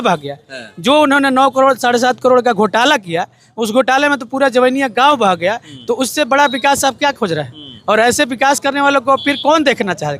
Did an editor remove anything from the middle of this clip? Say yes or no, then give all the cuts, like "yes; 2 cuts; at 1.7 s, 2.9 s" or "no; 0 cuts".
no; 0 cuts